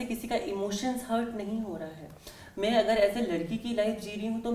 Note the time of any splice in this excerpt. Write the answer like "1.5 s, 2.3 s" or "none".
none